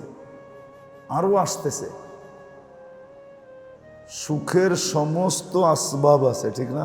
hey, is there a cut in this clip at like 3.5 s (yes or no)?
yes